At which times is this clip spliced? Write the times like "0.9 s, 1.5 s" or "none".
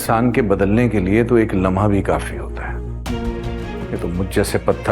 3.7 s